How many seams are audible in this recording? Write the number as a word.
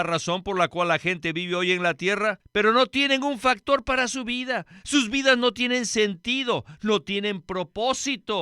one